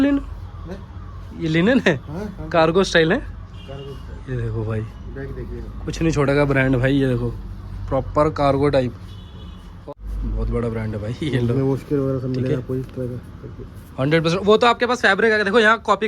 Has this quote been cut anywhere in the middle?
yes; 1 cut; at 9.9 s

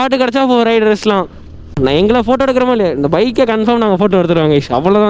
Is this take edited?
no; 0 cuts

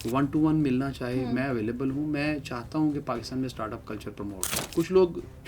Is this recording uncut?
no; 1 cut; at 4.5 s

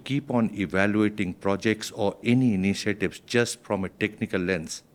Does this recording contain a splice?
no; 0 cuts

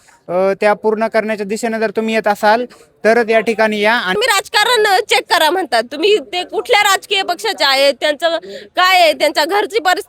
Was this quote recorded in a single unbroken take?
no; 1 cut; at 4.2 s

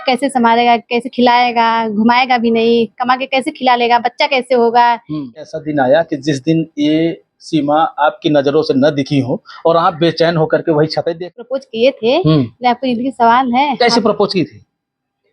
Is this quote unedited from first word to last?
no; 2 cuts; at 5.4 s, 11.3 s

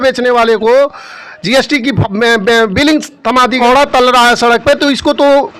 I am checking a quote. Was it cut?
yes; 1 cut; at 3.6 s

